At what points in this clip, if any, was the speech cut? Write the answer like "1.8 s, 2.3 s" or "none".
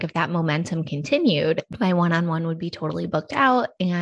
1.6 s